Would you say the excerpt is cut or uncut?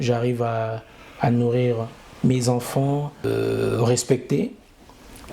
cut